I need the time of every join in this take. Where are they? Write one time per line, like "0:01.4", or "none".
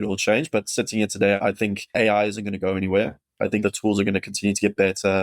0:01.4
0:03.6